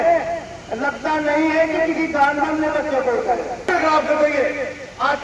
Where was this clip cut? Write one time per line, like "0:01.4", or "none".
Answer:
0:03.7

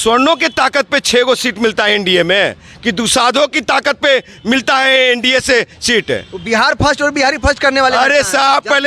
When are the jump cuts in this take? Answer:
none

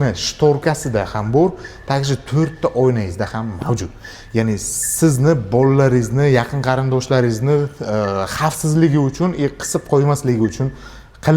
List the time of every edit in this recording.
none

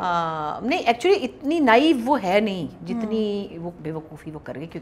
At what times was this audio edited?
0:03.8

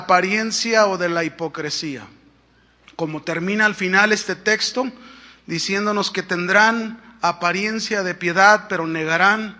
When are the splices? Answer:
0:05.8

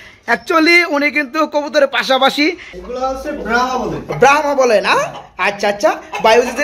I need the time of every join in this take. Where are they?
0:02.7

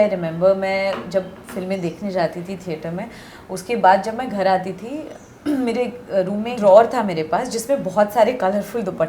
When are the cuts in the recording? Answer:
0:06.5

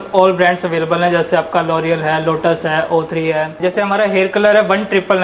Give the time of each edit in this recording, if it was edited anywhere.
0:03.5

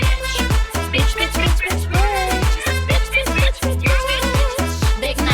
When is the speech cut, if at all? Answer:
none

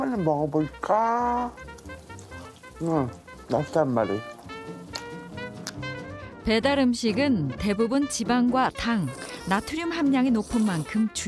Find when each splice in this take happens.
none

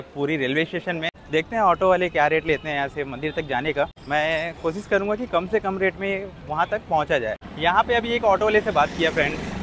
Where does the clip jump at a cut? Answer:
0:01.2
0:04.0
0:07.5

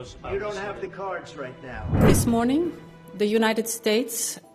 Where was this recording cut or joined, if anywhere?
0:02.0

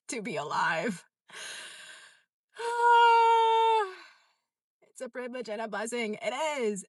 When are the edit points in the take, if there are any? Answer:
none

